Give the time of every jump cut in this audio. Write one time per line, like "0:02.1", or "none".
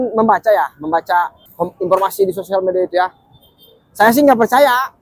0:01.4